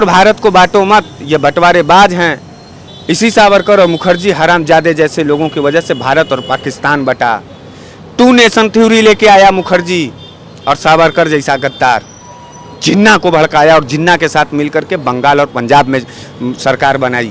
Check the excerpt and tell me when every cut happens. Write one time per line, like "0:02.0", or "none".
none